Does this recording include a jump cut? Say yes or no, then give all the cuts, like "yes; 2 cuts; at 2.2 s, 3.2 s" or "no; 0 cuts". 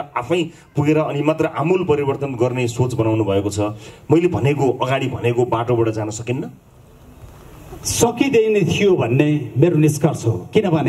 no; 0 cuts